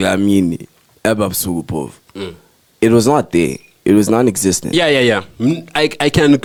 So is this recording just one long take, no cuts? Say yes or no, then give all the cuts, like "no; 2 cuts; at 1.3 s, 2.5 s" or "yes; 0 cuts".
yes; 0 cuts